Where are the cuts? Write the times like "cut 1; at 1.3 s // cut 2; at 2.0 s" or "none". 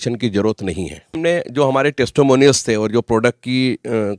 cut 1; at 1.1 s